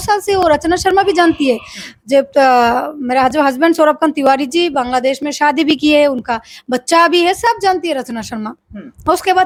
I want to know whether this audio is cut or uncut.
uncut